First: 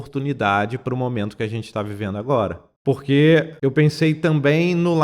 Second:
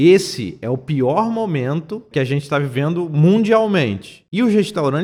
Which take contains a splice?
first; 2 cuts; at 2.7 s, 3.5 s

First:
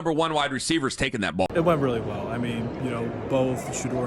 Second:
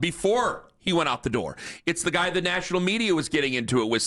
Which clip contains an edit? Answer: first; 1 cut; at 1.5 s

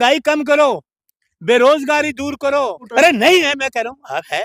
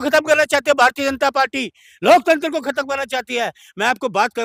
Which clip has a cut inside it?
first; 1 cut; at 2.8 s

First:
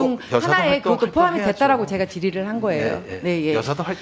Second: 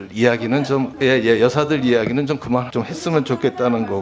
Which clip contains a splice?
second; 2 cuts; at 0.9 s, 2.7 s

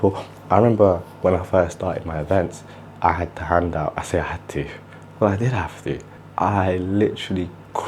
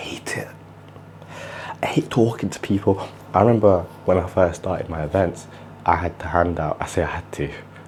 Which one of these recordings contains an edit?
first; 1 cut; at 6.0 s

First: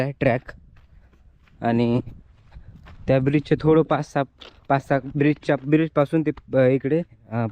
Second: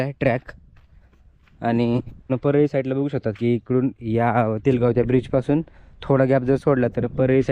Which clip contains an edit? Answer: second; 1 cut; at 2.3 s

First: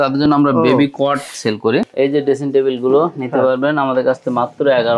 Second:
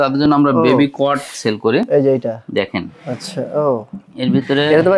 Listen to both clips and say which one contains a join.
first; 1 cut; at 1.9 s

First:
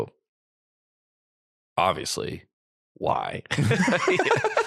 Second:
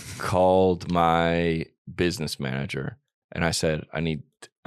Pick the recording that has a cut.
second; 1 cut; at 3.2 s

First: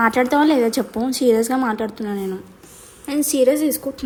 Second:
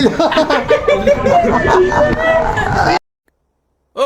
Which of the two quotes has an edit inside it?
second; 1 cut; at 3.0 s

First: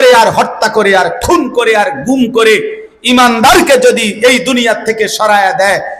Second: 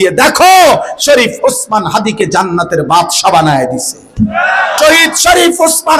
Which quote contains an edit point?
second; 1 cut; at 4.8 s

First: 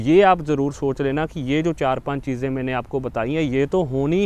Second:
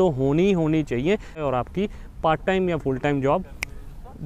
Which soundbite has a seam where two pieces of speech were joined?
second; 1 cut; at 1.4 s

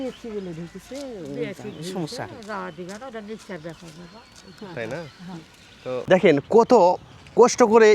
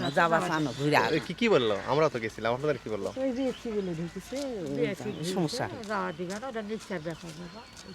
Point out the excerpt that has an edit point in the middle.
first; 1 cut; at 6.2 s

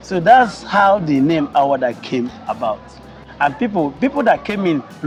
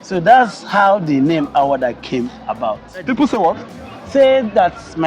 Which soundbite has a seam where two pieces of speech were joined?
second; 1 cut; at 3.1 s

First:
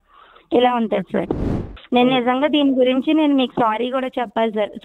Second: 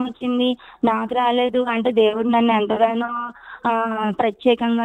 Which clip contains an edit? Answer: first; 1 cut; at 1.6 s

